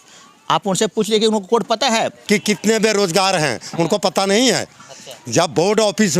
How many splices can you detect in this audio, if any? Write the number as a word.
one